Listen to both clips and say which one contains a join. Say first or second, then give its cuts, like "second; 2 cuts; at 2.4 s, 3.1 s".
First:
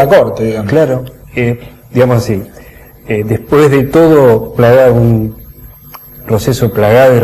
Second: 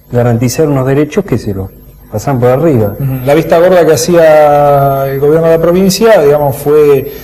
second; 1 cut; at 1.0 s